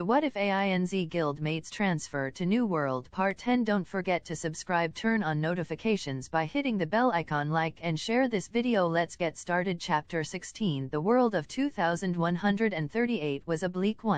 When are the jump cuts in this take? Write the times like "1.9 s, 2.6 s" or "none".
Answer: 0.9 s